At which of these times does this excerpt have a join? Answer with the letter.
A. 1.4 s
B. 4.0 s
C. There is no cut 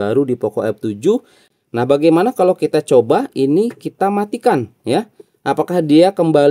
A